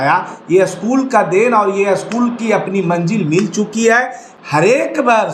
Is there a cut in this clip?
no; 0 cuts

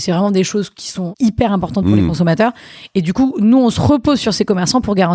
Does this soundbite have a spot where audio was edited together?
yes; 1 cut; at 1.1 s

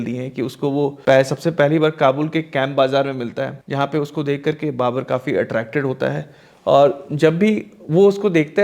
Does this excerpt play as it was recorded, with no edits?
no; 2 cuts; at 1.0 s, 3.6 s

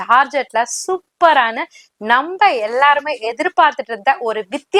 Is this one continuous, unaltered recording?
yes; 0 cuts

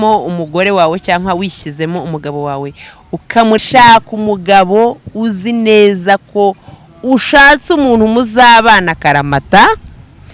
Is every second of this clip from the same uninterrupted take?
no; 1 cut; at 3.6 s

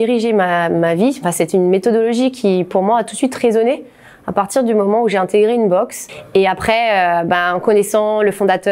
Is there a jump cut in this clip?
no; 0 cuts

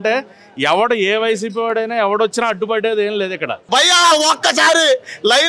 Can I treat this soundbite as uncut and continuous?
no; 1 cut; at 3.5 s

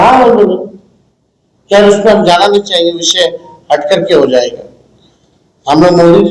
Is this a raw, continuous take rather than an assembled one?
yes; 0 cuts

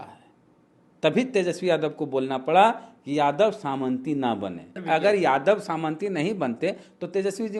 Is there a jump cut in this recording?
yes; 1 cut; at 4.8 s

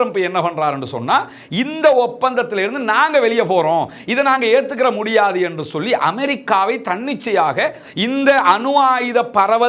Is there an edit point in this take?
no; 0 cuts

